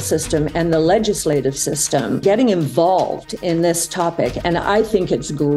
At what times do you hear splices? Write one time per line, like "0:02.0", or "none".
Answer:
0:02.2